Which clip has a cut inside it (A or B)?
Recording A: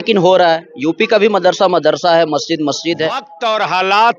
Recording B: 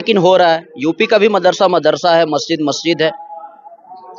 A